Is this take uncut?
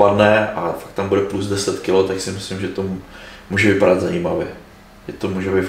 yes; 0 cuts

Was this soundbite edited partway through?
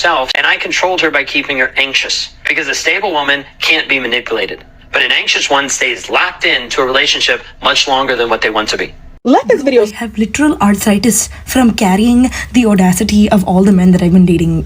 yes; 1 cut; at 9.9 s

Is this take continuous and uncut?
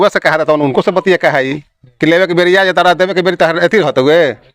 yes; 0 cuts

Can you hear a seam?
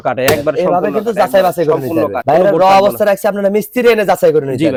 no; 0 cuts

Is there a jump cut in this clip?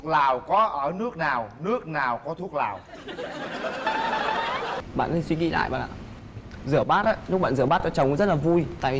yes; 1 cut; at 4.8 s

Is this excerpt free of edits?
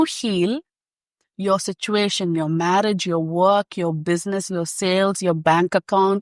yes; 0 cuts

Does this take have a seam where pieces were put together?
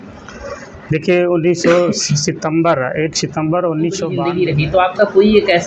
yes; 1 cut; at 4.2 s

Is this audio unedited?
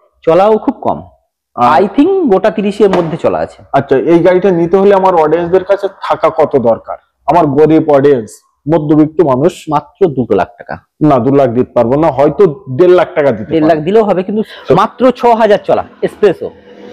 no; 1 cut; at 14.5 s

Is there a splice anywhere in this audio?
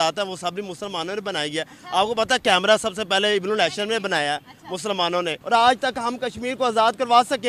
yes; 1 cut; at 5.4 s

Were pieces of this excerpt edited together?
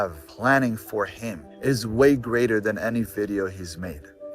no; 0 cuts

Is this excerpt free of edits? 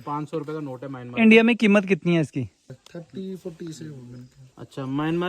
no; 1 cut; at 2.7 s

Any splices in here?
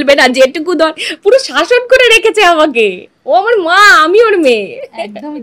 no; 0 cuts

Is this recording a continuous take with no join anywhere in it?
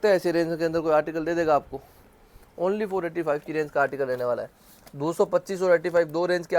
yes; 0 cuts

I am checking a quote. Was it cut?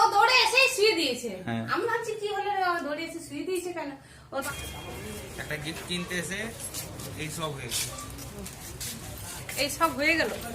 yes; 1 cut; at 4.4 s

